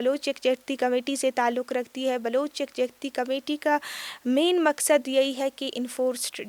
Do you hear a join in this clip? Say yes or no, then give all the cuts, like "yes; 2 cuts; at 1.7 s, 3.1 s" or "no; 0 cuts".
no; 0 cuts